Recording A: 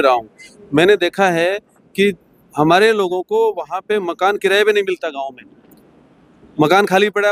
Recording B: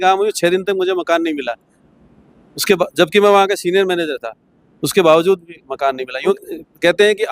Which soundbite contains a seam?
B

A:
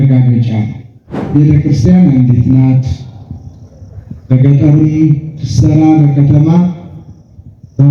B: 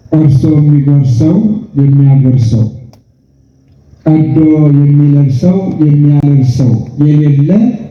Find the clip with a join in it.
A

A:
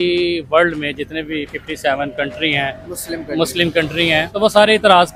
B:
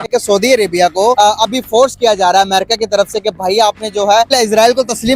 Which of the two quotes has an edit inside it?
B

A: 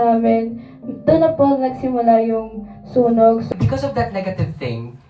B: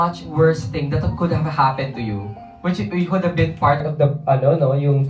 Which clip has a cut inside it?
A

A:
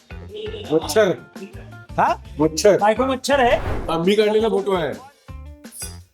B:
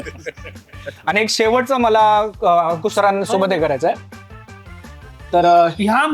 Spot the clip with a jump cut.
A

